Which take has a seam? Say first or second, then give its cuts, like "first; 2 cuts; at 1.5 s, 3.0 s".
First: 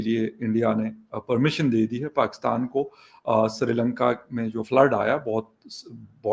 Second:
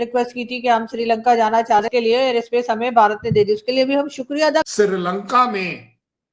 second; 2 cuts; at 1.9 s, 4.7 s